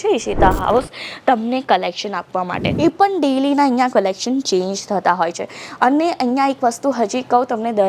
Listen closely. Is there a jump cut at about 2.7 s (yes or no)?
yes